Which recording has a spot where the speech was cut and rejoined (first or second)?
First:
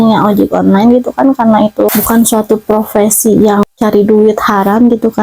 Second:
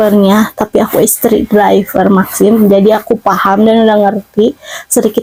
first